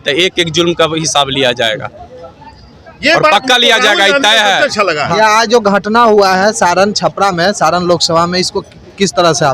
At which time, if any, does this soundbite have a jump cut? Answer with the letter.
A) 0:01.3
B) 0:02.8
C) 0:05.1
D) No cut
C